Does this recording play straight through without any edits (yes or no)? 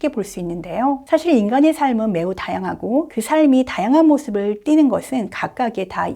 no